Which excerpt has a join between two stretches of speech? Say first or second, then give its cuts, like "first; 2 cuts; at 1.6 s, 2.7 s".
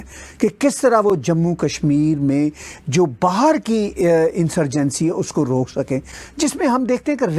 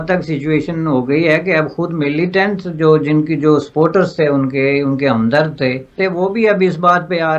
second; 1 cut; at 6.0 s